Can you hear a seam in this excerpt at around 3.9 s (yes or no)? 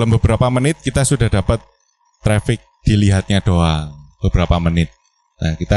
no